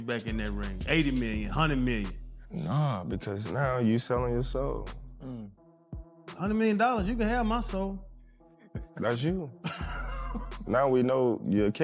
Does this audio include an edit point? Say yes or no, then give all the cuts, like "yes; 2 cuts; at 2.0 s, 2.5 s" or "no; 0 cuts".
no; 0 cuts